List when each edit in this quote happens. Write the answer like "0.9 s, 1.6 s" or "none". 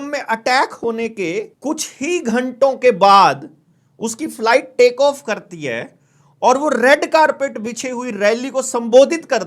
1.5 s